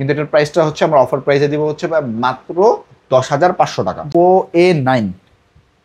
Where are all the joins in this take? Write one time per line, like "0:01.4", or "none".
0:04.1